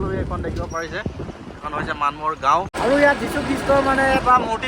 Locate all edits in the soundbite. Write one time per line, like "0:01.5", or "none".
0:02.7